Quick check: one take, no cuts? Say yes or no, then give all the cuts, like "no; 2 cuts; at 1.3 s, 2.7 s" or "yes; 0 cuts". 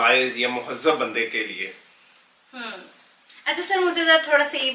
yes; 0 cuts